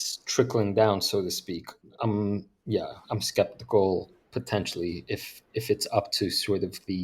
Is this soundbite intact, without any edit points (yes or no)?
yes